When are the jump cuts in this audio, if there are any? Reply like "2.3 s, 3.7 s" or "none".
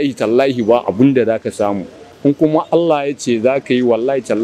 none